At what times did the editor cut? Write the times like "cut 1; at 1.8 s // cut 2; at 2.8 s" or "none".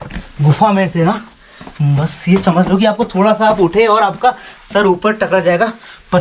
none